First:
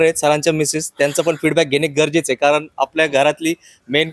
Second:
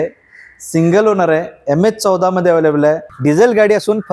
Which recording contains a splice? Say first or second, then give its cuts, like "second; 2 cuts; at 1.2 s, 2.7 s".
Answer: second; 1 cut; at 3.1 s